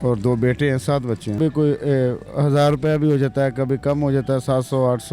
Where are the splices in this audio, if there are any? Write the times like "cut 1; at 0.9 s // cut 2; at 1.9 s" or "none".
cut 1; at 1.4 s